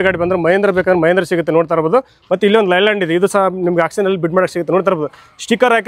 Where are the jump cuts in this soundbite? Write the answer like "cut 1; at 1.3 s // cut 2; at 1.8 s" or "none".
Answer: none